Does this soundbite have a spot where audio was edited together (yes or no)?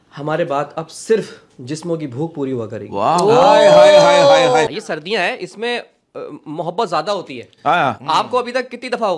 yes